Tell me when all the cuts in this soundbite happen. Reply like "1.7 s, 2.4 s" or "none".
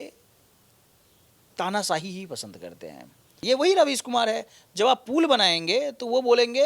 3.3 s

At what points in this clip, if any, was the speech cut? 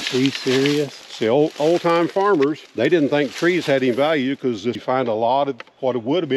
1.0 s, 2.6 s, 4.8 s

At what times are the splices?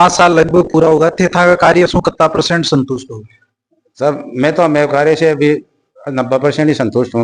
none

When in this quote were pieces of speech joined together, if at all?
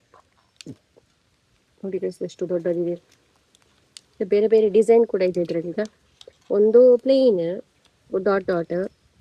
none

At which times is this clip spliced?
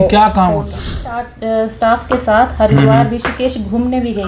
1.0 s

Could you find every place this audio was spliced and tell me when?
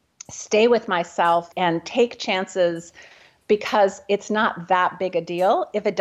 none

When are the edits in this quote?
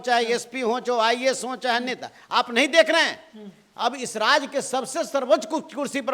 none

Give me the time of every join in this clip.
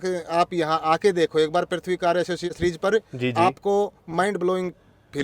2.5 s

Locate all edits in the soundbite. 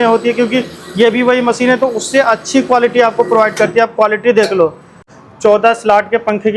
5.0 s

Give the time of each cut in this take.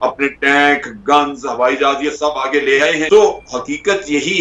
3.0 s

